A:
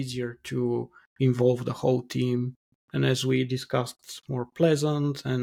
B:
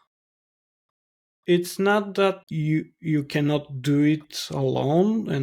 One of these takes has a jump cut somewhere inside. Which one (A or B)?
B